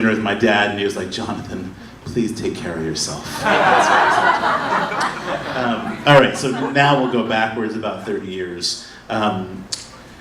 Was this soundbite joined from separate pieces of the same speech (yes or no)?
yes